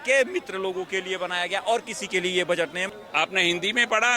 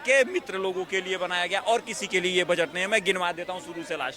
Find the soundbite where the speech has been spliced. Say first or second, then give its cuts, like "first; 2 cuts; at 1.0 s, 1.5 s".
first; 1 cut; at 2.8 s